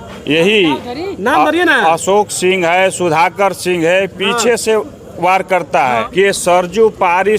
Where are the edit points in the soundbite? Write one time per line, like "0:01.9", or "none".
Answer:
0:06.1